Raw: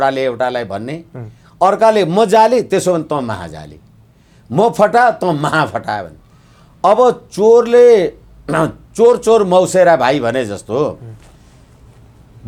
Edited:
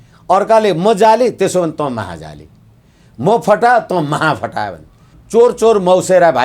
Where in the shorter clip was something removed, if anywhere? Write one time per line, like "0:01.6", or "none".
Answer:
0:05.1